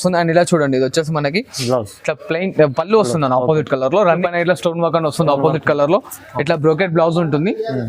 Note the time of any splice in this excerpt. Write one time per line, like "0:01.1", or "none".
0:04.2